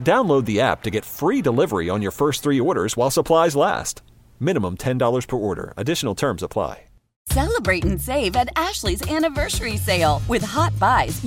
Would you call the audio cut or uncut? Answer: cut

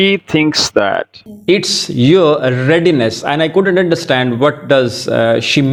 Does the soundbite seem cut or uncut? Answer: uncut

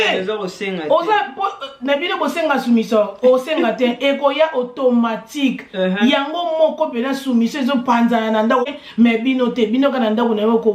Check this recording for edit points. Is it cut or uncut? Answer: cut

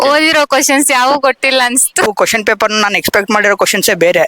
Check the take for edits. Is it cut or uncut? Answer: cut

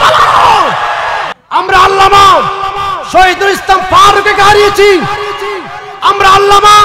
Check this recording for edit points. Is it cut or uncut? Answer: cut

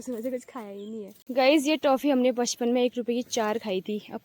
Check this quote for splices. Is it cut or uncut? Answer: cut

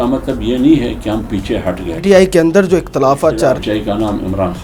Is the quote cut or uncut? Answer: cut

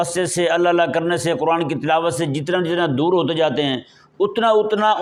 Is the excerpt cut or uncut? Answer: uncut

